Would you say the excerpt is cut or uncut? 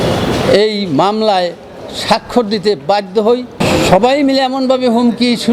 cut